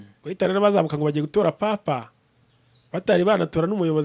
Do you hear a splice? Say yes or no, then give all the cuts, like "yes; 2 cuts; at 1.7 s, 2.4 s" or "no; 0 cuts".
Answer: no; 0 cuts